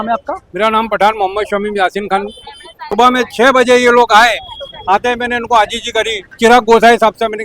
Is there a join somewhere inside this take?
yes; 2 cuts; at 2.9 s, 6.3 s

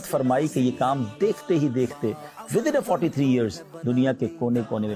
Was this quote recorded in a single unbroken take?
yes; 0 cuts

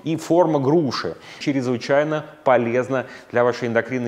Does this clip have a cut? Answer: yes; 1 cut; at 1.3 s

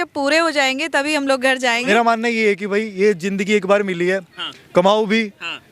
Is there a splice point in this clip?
yes; 1 cut; at 1.9 s

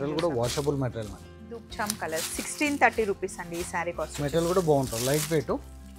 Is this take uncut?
no; 1 cut; at 1.7 s

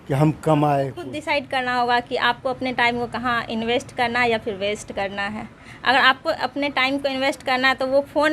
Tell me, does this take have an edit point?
yes; 1 cut; at 1.1 s

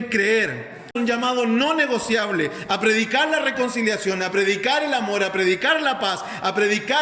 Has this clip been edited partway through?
yes; 1 cut; at 0.9 s

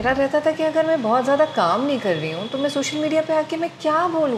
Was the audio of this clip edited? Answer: no; 0 cuts

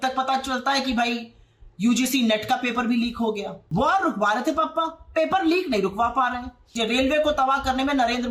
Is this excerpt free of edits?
no; 2 cuts; at 3.5 s, 6.6 s

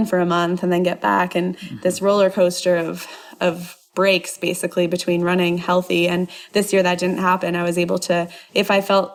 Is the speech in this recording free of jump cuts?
yes; 0 cuts

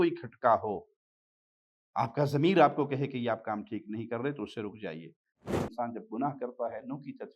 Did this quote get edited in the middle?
yes; 1 cut; at 5.5 s

